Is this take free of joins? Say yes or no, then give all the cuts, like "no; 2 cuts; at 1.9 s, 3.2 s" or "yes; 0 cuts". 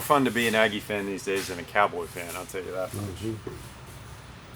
yes; 0 cuts